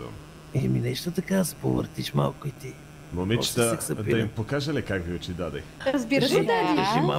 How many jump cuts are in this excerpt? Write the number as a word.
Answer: one